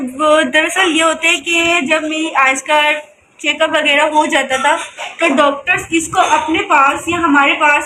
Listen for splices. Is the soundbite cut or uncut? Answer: uncut